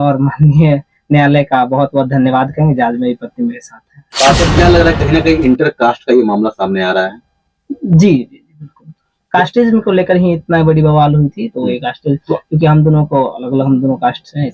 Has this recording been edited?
yes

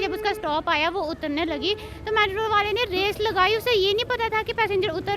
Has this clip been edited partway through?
no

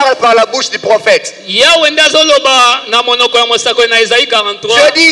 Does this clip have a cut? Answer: no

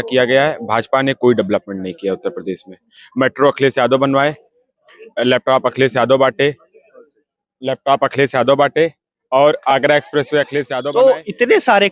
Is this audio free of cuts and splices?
yes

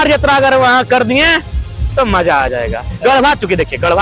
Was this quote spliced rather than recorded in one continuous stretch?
no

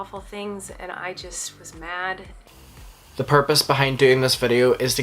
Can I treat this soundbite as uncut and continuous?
no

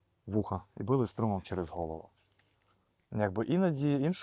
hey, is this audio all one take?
yes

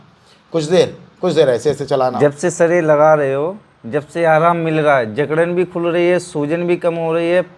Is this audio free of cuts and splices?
no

